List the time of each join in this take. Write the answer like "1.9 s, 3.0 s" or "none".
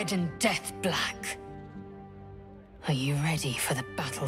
none